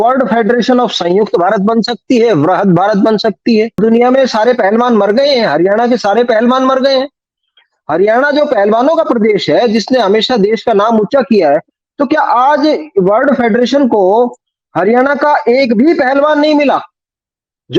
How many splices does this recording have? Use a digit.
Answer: 1